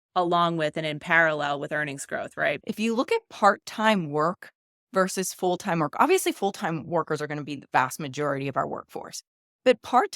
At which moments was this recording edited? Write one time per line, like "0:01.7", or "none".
0:02.6